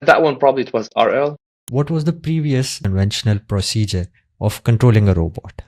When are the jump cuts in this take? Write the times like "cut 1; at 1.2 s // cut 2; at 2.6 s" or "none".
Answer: cut 1; at 1.6 s // cut 2; at 2.8 s